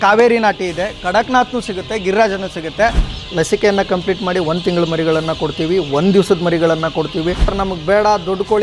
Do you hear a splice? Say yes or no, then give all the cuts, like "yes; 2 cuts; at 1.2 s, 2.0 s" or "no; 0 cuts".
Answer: yes; 2 cuts; at 3.1 s, 7.5 s